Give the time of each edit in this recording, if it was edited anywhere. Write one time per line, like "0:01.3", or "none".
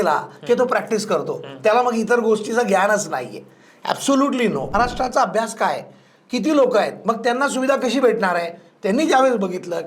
0:04.7